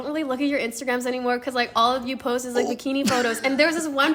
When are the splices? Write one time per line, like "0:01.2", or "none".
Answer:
none